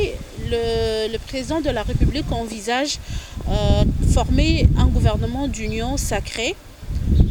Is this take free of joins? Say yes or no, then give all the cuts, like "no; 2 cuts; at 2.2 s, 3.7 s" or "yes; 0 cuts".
yes; 0 cuts